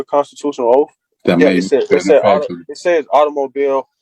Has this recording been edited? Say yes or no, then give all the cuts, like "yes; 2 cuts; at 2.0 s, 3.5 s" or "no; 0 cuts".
yes; 1 cut; at 1.0 s